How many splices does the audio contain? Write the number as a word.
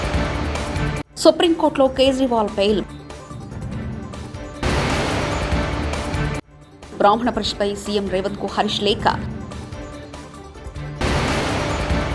one